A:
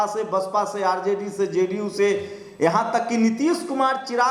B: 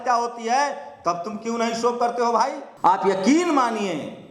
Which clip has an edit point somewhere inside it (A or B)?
B